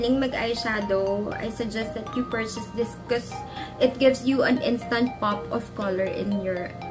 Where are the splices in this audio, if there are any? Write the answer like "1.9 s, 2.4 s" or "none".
none